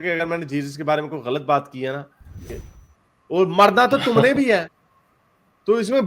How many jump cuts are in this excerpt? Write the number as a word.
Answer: one